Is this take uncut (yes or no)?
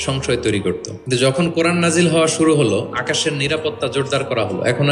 no